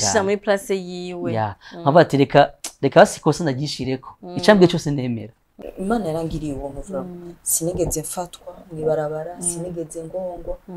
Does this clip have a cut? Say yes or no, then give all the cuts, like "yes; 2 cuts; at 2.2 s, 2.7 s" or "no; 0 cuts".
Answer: yes; 1 cut; at 5.5 s